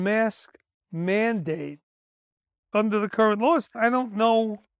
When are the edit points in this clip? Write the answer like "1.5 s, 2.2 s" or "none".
none